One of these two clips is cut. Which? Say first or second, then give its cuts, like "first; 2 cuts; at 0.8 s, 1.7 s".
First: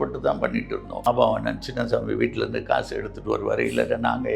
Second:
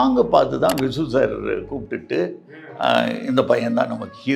first; 1 cut; at 1.0 s